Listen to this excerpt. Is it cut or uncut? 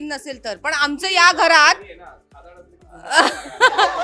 uncut